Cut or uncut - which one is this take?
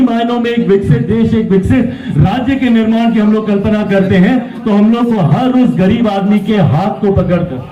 uncut